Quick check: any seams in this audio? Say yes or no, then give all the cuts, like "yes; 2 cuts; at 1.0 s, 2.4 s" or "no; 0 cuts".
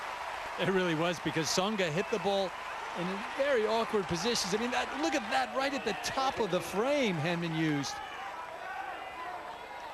no; 0 cuts